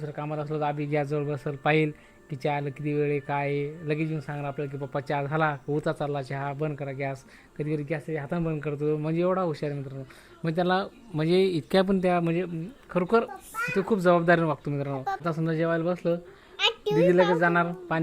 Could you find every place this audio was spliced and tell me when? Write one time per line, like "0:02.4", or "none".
0:15.2